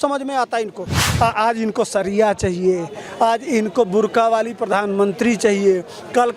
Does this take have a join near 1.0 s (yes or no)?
yes